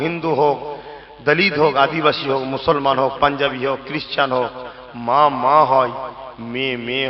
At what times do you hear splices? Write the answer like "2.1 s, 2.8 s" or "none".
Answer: none